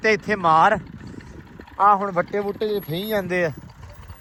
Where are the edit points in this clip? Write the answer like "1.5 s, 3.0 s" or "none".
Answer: none